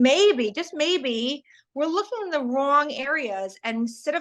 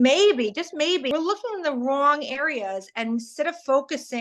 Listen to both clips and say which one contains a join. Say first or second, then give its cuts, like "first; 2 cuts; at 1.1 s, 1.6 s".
second; 1 cut; at 1.1 s